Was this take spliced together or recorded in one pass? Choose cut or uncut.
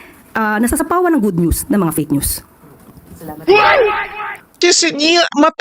cut